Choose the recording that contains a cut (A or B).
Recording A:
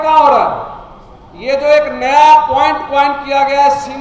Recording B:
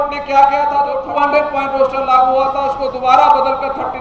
B